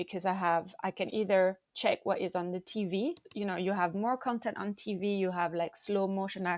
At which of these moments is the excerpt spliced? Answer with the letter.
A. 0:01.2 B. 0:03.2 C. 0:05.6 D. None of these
B